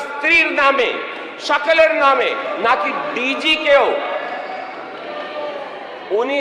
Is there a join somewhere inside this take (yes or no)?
no